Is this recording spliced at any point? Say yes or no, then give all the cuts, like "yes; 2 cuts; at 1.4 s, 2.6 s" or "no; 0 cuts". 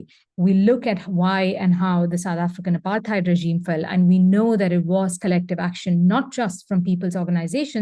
no; 0 cuts